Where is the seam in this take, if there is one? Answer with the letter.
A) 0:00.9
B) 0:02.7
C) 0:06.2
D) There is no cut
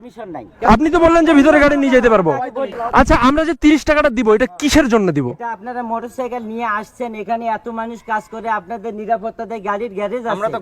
B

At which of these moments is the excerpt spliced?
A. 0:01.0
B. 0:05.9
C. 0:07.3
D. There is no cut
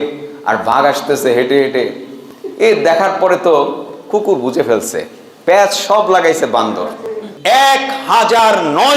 C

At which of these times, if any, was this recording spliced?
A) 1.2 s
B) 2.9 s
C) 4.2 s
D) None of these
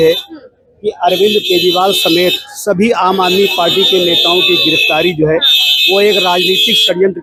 D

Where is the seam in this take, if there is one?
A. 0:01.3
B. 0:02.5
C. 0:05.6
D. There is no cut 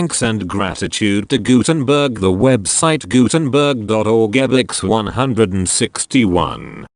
D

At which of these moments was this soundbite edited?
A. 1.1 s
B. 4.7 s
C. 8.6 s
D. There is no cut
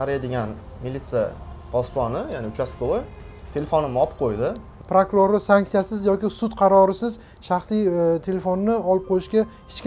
B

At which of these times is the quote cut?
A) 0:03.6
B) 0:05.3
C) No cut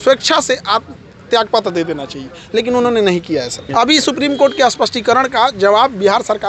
A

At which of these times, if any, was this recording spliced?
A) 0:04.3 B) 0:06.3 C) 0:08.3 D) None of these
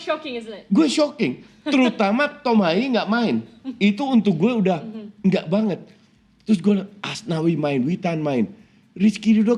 D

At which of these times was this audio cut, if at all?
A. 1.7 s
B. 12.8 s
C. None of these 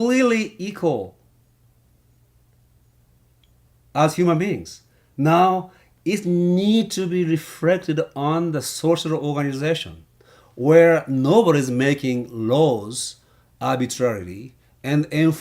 B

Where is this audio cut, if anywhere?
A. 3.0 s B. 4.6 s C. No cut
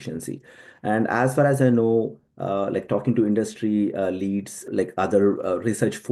B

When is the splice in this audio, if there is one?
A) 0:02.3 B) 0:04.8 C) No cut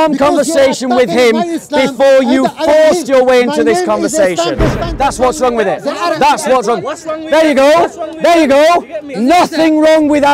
B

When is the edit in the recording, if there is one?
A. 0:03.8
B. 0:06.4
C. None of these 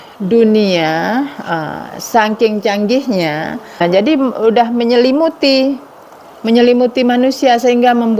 A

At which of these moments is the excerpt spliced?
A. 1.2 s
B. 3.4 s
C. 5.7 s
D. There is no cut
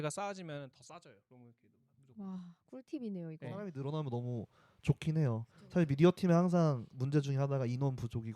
B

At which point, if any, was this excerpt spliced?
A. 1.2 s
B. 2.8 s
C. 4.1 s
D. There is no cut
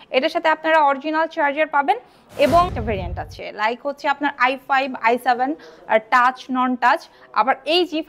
B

